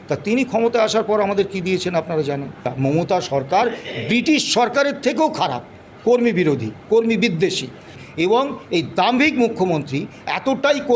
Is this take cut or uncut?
cut